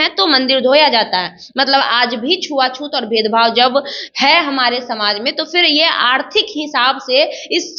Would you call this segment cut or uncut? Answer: uncut